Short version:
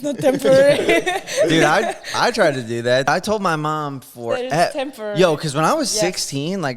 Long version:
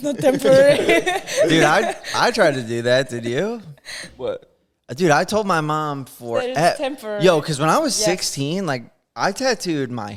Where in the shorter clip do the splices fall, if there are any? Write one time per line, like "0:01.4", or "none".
0:03.1